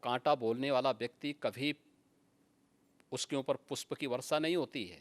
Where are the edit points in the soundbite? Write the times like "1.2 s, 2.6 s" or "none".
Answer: none